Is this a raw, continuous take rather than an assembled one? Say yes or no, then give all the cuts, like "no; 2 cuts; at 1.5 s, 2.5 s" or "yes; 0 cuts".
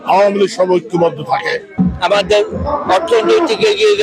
no; 1 cut; at 1.7 s